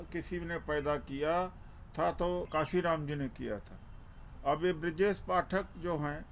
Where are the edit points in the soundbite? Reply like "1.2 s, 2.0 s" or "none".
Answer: 2.5 s